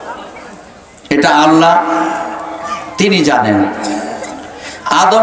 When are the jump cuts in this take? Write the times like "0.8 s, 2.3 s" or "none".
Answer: none